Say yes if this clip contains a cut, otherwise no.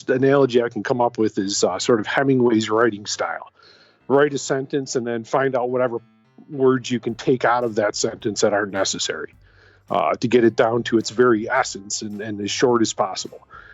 no